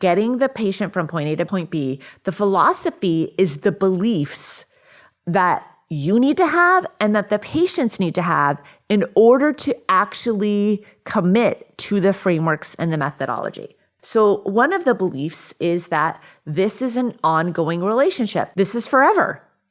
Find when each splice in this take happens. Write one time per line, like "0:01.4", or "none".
0:01.5